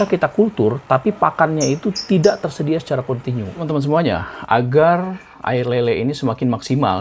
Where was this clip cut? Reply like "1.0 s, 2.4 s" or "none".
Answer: 3.6 s